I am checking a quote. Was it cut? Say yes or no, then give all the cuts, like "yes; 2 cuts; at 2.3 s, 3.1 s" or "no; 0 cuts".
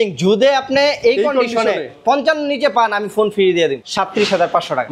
yes; 1 cut; at 3.8 s